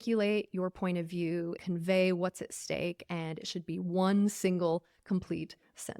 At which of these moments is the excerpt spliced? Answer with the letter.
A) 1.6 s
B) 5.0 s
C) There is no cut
A